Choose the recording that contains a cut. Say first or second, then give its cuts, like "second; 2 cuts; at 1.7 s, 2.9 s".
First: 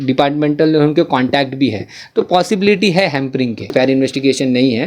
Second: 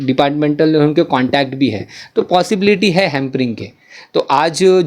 first; 1 cut; at 3.7 s